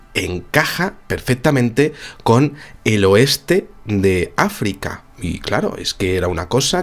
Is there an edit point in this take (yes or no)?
yes